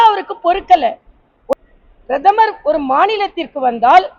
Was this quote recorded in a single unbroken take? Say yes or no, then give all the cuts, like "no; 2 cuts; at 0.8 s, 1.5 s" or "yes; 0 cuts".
no; 1 cut; at 1.5 s